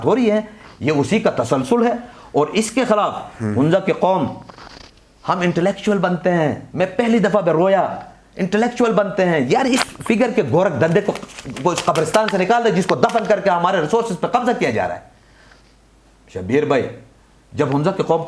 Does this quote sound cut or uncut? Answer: uncut